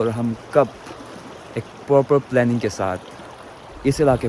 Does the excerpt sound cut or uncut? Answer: uncut